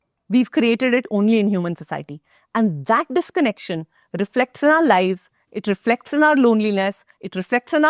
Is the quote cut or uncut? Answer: uncut